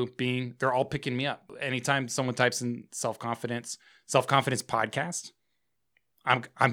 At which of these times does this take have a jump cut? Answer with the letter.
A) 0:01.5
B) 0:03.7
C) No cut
A